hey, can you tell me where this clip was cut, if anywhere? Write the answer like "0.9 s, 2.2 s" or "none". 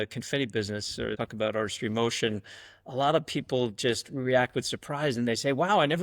1.1 s